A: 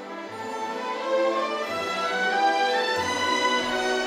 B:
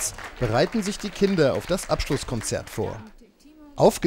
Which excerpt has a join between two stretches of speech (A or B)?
B